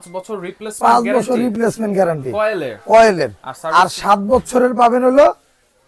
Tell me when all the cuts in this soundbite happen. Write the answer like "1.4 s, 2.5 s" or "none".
none